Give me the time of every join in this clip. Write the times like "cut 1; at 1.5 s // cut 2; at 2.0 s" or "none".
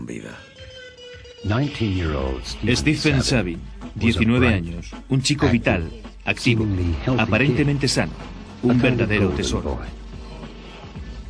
cut 1; at 6.4 s

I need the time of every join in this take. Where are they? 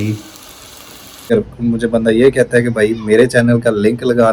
cut 1; at 1.3 s

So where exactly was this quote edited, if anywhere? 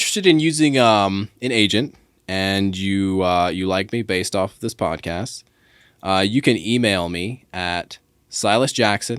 none

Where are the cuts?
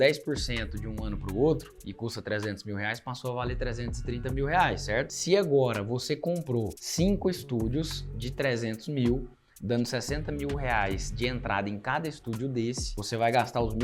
none

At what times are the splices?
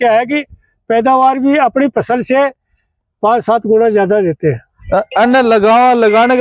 none

